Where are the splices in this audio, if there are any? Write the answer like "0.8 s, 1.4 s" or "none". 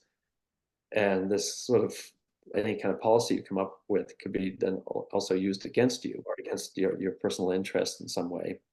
6.2 s

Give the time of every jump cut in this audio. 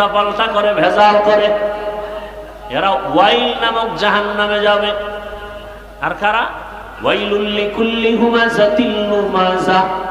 2.8 s

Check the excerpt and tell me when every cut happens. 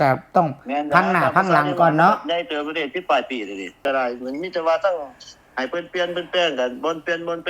3.8 s

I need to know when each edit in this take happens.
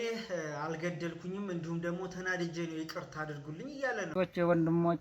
4.1 s

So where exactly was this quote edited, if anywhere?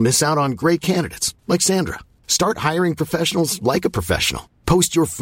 none

